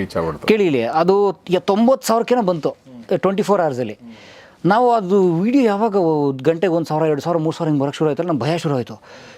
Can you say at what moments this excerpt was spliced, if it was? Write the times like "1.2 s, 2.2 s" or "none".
none